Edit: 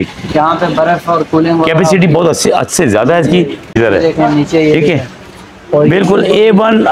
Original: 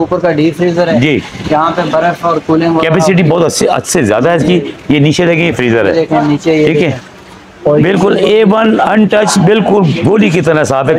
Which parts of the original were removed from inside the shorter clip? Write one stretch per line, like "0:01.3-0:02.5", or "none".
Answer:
0:04.8-0:05.6